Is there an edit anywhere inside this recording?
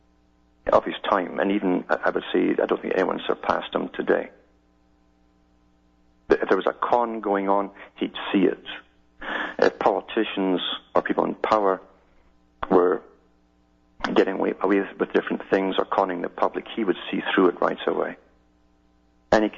no; 0 cuts

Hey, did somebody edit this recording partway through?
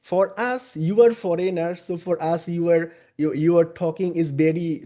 no; 0 cuts

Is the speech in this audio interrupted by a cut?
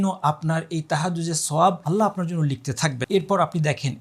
yes; 2 cuts; at 1.8 s, 3.0 s

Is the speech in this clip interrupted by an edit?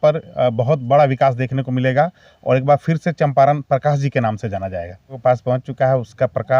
yes; 1 cut; at 5.2 s

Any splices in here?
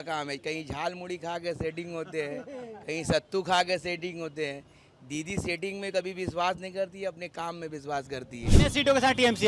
yes; 1 cut; at 8.5 s

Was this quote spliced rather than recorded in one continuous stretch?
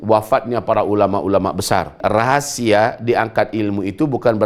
yes; 1 cut; at 2.0 s

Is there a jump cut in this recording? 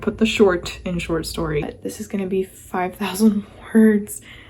yes; 1 cut; at 1.6 s

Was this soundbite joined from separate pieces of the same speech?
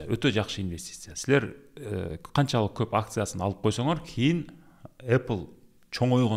no; 0 cuts

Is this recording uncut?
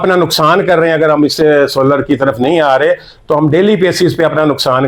yes; 0 cuts

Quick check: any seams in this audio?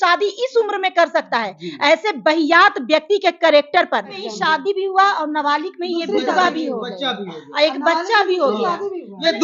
yes; 1 cut; at 4.2 s

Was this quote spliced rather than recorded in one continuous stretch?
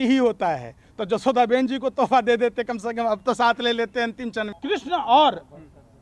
yes; 1 cut; at 4.5 s

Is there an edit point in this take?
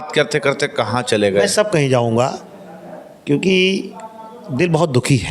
no; 0 cuts

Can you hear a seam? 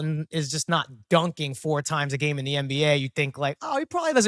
no; 0 cuts

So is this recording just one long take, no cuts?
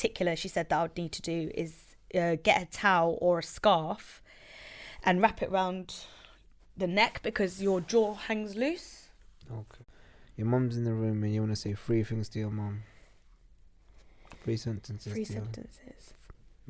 no; 1 cut; at 9.7 s

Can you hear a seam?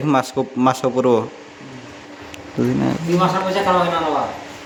no; 0 cuts

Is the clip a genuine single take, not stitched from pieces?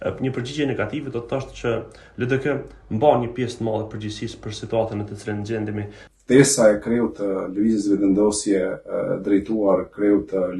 no; 1 cut; at 6.0 s

